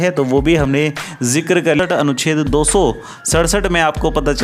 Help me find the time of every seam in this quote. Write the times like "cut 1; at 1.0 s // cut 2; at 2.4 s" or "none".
cut 1; at 1.8 s

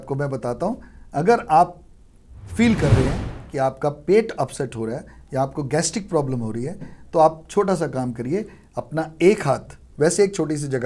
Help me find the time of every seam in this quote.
cut 1; at 9.8 s

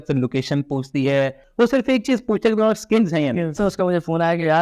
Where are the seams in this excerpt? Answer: cut 1; at 1.4 s // cut 2; at 3.6 s

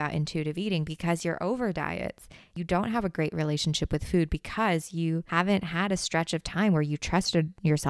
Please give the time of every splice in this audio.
cut 1; at 2.5 s // cut 2; at 5.2 s

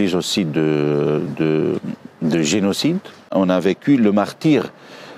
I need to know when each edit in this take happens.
cut 1; at 3.3 s

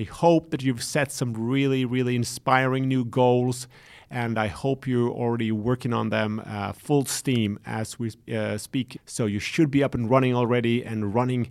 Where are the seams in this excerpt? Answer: cut 1; at 9.0 s

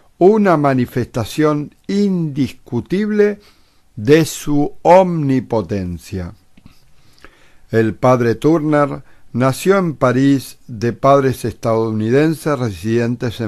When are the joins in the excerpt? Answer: none

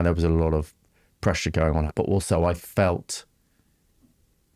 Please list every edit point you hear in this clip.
cut 1; at 1.9 s

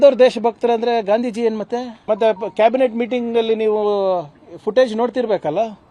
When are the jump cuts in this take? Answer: cut 1; at 1.9 s

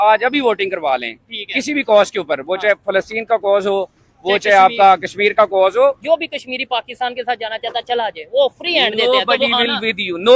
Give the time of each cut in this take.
cut 1; at 6.0 s

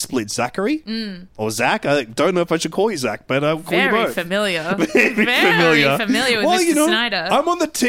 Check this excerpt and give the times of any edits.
none

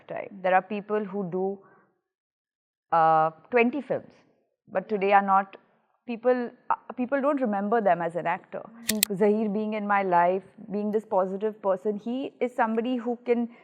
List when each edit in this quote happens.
cut 1; at 8.9 s

